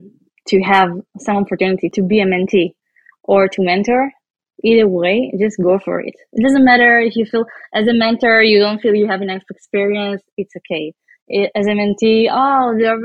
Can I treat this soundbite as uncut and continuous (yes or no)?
no